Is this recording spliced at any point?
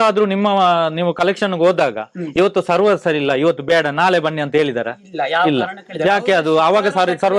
no; 0 cuts

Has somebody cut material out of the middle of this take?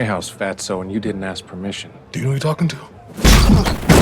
yes; 1 cut; at 2.0 s

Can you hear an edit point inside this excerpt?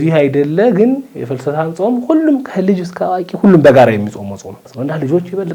yes; 1 cut; at 4.6 s

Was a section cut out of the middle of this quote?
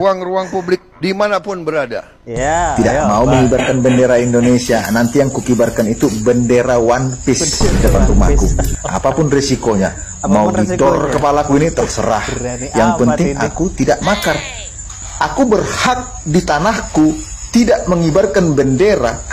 no; 0 cuts

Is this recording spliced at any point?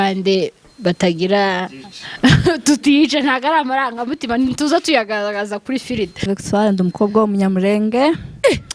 yes; 1 cut; at 6.2 s

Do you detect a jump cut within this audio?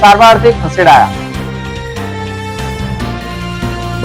no; 0 cuts

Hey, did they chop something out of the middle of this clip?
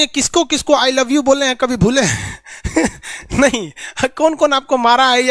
no; 0 cuts

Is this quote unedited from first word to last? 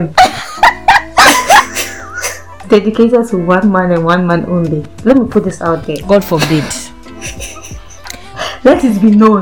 no; 2 cuts; at 2.6 s, 4.9 s

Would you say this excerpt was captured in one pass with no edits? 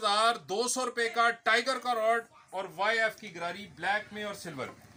yes; 0 cuts

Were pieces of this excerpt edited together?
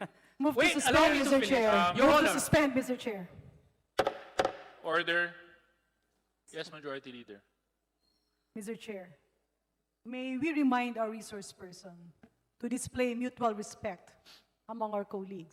no; 0 cuts

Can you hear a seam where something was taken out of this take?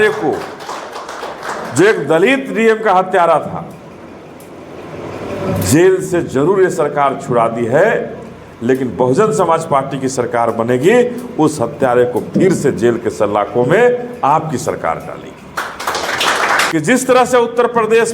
yes; 1 cut; at 16.6 s

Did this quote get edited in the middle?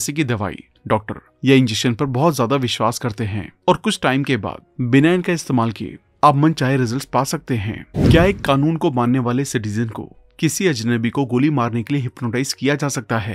yes; 1 cut; at 7.8 s

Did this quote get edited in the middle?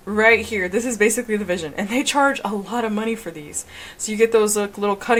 no; 0 cuts

